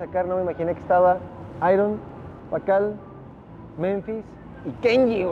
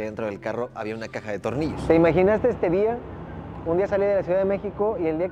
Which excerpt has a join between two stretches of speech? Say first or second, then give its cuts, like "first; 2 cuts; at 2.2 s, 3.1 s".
second; 1 cut; at 1.8 s